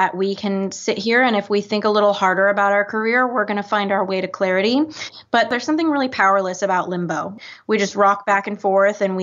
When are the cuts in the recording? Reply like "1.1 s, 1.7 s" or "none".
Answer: 5.5 s, 7.4 s

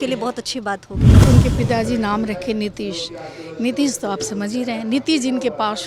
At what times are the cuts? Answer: 1.2 s

